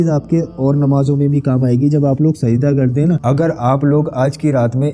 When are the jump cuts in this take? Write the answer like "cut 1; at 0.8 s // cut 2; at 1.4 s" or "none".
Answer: cut 1; at 3.2 s

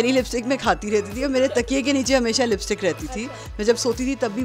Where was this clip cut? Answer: none

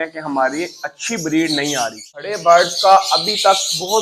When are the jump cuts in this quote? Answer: cut 1; at 2.3 s

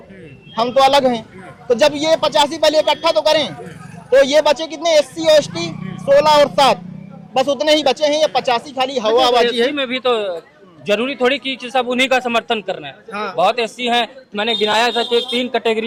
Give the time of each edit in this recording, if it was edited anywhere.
none

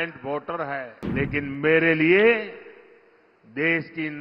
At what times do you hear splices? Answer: cut 1; at 1.0 s

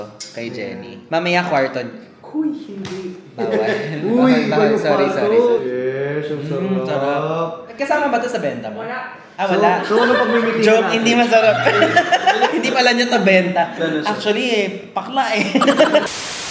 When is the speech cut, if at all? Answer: none

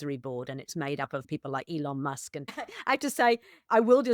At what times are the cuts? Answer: cut 1; at 1.3 s // cut 2; at 2.5 s

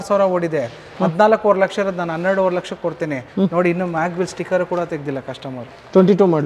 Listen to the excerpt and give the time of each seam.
none

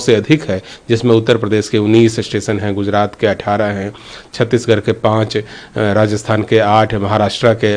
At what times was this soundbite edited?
none

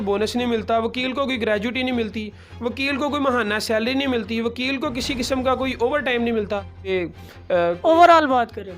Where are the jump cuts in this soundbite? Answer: cut 1; at 6.9 s

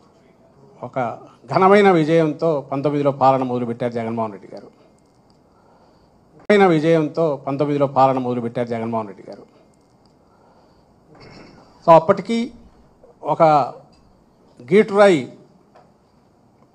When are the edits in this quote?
cut 1; at 6.5 s

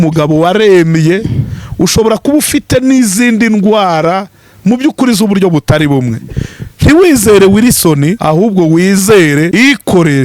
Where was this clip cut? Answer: cut 1; at 8.2 s // cut 2; at 9.5 s

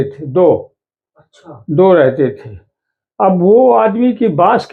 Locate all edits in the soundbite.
none

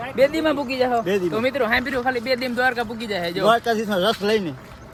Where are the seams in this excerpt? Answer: none

